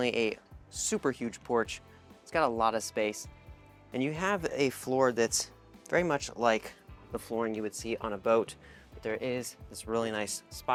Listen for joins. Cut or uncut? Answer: uncut